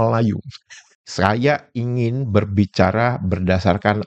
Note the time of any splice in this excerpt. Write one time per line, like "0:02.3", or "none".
0:01.0